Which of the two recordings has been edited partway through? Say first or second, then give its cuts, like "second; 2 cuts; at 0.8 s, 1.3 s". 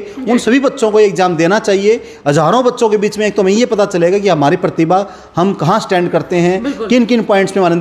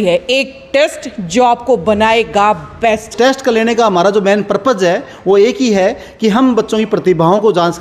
second; 1 cut; at 3.1 s